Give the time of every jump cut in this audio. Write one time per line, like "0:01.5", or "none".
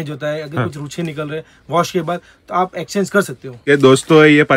0:03.5